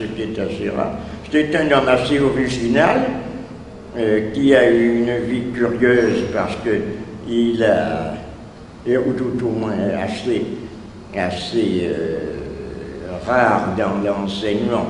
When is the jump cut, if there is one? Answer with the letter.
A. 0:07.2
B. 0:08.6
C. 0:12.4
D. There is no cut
A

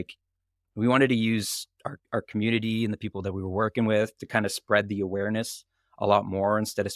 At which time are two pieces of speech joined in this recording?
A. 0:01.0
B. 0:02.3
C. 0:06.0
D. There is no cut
D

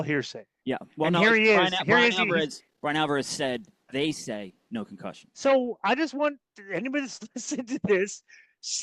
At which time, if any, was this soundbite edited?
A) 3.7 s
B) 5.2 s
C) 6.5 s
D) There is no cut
B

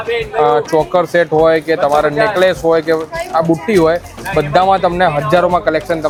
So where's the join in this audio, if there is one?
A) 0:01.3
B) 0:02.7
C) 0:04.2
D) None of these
D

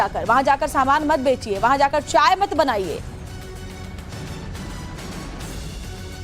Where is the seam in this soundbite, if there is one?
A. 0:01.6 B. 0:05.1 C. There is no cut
A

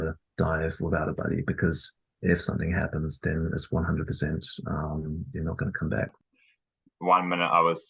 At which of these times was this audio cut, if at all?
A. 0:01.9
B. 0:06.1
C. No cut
B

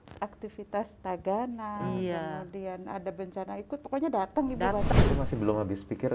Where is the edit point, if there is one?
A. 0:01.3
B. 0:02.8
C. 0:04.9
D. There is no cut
C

